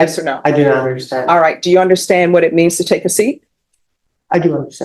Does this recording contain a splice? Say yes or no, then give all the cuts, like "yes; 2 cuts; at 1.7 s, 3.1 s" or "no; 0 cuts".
no; 0 cuts